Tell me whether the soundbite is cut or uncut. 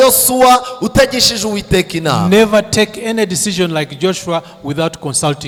uncut